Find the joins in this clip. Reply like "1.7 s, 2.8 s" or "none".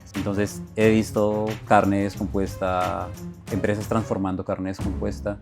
1.6 s